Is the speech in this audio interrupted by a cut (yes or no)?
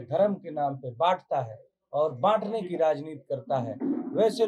no